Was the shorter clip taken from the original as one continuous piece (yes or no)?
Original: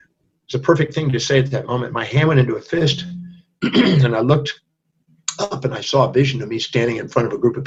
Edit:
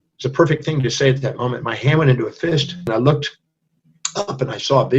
no